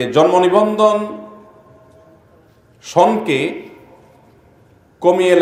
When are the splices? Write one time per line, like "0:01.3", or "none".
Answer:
none